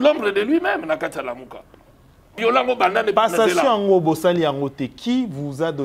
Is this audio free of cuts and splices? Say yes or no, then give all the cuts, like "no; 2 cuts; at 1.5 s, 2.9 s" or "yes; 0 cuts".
no; 1 cut; at 2.4 s